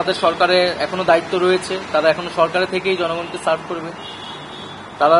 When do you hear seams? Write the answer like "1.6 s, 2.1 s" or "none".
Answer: none